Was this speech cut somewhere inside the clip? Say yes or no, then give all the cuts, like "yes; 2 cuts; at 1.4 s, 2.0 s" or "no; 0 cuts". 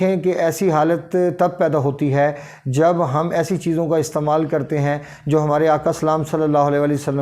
no; 0 cuts